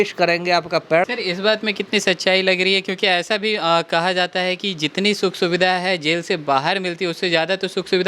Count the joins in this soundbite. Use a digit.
1